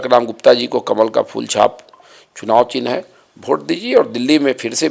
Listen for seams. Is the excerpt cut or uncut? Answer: uncut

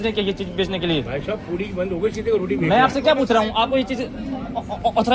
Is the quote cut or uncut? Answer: uncut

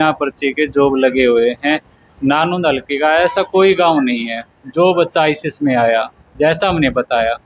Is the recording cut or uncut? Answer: uncut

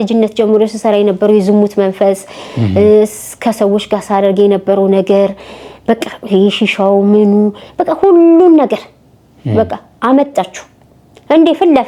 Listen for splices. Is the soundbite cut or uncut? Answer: uncut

